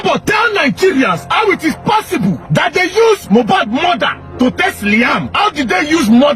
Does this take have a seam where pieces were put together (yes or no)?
yes